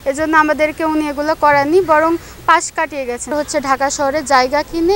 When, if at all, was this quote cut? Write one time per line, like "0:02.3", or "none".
0:03.3